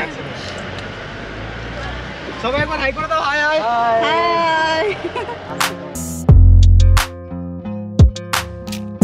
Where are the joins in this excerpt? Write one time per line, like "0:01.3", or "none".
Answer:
0:05.5